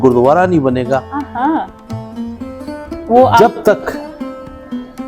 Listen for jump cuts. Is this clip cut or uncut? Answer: uncut